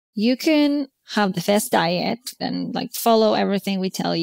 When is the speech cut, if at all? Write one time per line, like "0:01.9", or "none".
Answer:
0:00.9
0:02.4